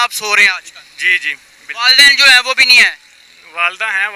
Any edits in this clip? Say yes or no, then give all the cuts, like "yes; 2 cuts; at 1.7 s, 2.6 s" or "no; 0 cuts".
no; 0 cuts